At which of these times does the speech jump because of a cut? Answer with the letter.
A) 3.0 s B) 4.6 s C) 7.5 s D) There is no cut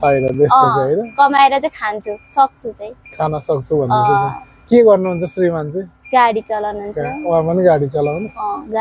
D